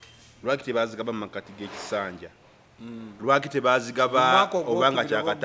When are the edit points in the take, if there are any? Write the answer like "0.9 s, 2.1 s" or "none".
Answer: none